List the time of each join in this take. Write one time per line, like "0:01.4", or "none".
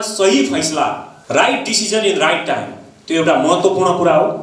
0:01.1